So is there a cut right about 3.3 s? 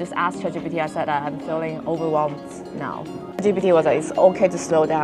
yes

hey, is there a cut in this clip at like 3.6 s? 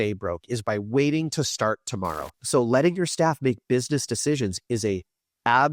no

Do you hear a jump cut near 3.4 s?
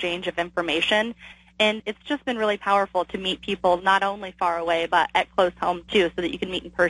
no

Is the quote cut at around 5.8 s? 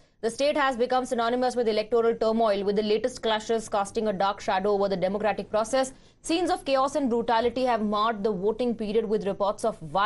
yes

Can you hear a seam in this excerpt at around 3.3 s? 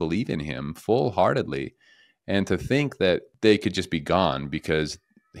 yes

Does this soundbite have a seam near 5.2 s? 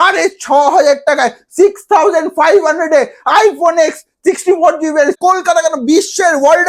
yes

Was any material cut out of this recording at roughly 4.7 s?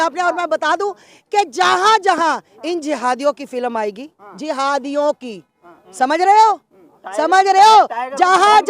no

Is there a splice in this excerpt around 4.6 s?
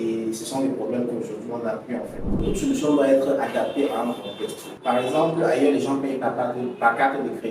yes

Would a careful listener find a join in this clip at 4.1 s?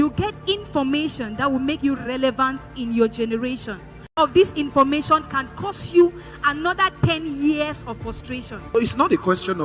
yes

